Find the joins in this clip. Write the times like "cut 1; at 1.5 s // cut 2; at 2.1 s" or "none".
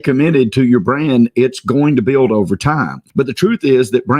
cut 1; at 3.0 s